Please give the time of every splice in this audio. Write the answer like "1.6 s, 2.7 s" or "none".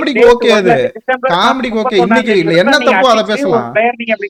none